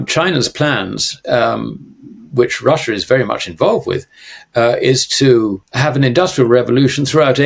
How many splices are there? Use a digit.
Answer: 1